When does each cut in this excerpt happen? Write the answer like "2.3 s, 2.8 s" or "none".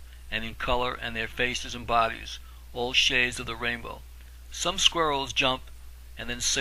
none